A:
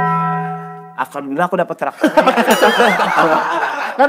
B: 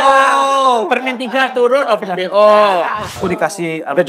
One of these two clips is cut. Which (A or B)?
B